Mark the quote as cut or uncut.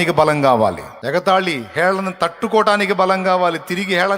cut